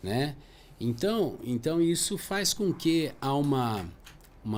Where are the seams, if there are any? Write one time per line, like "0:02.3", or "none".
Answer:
none